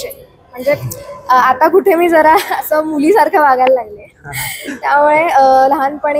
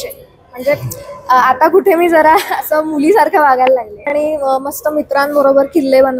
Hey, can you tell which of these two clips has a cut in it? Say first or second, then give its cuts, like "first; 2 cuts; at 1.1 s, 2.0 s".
second; 1 cut; at 4.1 s